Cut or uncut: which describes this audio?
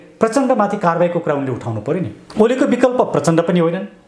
cut